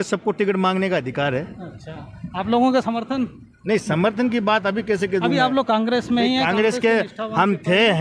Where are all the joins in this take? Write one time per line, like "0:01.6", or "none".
none